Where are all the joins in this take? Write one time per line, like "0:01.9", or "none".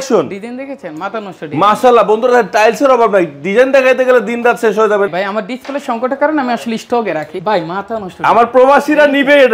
0:05.1
0:07.4